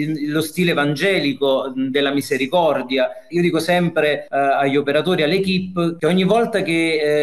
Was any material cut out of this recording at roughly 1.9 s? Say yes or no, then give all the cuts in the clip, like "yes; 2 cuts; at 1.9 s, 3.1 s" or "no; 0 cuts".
no; 2 cuts; at 4.2 s, 6.0 s